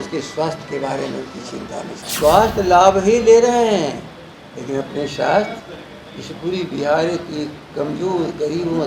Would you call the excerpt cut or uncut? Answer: cut